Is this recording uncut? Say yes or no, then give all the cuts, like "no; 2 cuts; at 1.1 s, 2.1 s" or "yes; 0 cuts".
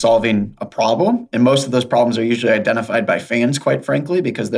yes; 0 cuts